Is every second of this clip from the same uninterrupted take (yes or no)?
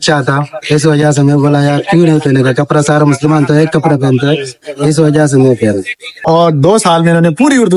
no